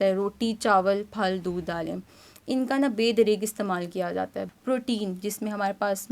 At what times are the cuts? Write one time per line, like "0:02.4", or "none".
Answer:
0:04.4